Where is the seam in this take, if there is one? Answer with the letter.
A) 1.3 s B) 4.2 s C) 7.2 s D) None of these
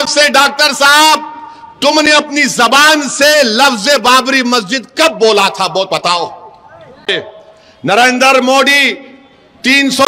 C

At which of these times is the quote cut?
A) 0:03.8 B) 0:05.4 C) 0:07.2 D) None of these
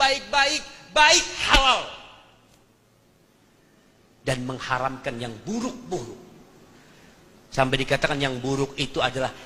D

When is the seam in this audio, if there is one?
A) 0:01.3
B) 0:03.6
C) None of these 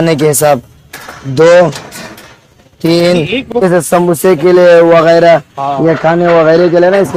B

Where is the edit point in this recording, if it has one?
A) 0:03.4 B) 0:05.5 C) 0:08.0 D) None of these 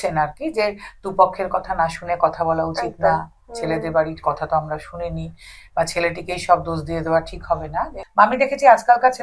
C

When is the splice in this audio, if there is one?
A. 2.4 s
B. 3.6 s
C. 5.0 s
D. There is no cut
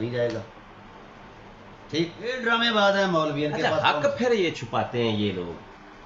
A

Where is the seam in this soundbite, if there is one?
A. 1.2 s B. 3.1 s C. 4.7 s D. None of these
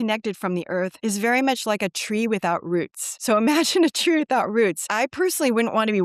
D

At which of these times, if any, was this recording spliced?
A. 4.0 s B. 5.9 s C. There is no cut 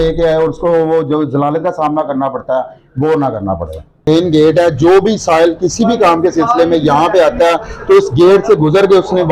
A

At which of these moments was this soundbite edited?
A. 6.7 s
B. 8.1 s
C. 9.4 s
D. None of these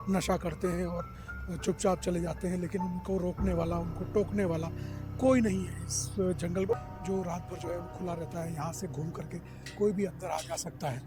A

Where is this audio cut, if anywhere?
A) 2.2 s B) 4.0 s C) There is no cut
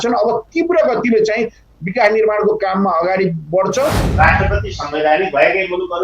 B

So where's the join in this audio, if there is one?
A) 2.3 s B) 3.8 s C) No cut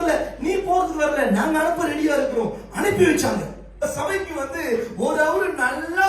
B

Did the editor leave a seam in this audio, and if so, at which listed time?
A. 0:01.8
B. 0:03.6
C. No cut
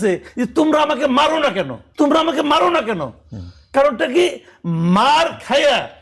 A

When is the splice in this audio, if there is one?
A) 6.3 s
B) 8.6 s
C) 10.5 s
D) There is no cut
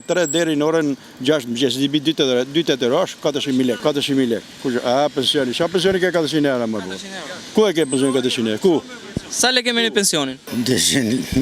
C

